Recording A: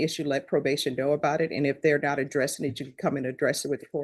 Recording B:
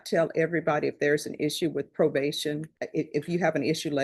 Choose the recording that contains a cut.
B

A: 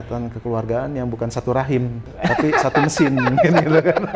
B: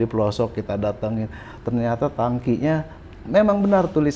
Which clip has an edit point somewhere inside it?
A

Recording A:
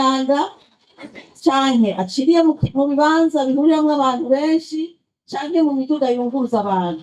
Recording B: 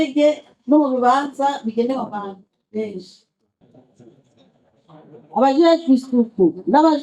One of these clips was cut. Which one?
B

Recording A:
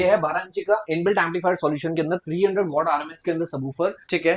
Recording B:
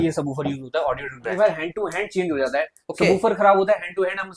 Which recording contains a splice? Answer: B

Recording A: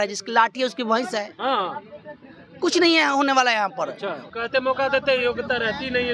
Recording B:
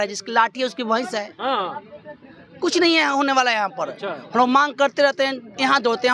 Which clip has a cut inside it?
A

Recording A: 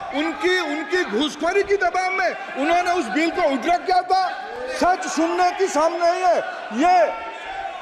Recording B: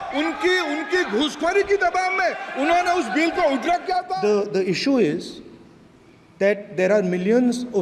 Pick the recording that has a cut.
B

